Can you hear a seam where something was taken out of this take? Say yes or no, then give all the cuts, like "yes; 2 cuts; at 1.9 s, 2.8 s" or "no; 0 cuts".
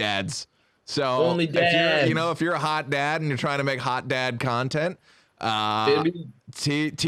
no; 0 cuts